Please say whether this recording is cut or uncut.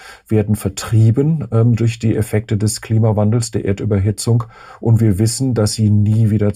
uncut